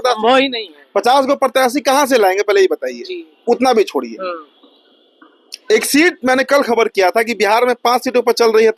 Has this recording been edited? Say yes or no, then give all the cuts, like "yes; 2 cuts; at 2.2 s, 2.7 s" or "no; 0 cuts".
no; 0 cuts